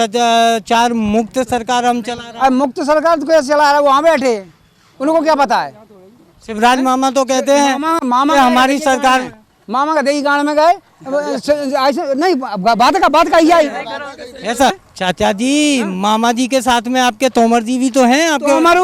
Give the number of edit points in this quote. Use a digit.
1